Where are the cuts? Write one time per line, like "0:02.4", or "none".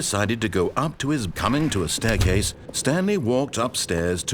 0:01.3